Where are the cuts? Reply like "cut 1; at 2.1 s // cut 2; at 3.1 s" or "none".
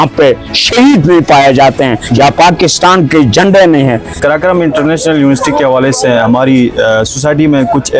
cut 1; at 4.2 s

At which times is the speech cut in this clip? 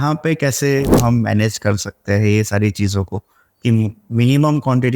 cut 1; at 0.9 s

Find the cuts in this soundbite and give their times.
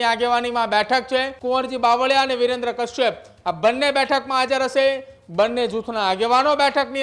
cut 1; at 1.3 s

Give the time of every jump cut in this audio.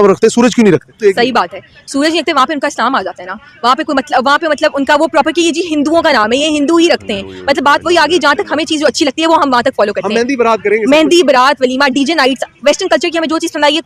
cut 1; at 1.0 s

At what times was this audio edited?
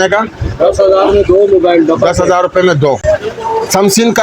cut 1; at 3.0 s

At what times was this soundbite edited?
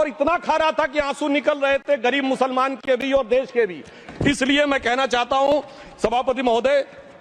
none

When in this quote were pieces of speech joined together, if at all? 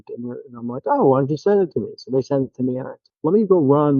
cut 1; at 3.1 s

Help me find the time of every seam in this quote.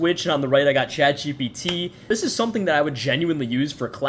cut 1; at 2.0 s

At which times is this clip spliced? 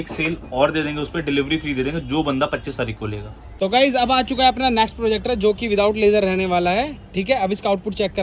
cut 1; at 3.5 s

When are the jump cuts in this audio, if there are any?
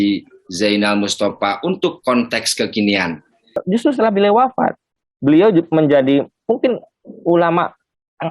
cut 1; at 3.5 s

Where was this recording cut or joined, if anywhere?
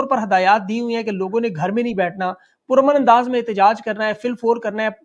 none

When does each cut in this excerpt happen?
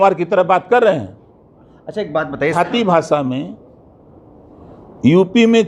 cut 1; at 2.5 s

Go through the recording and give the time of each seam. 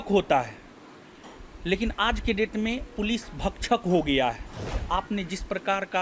cut 1; at 4.7 s

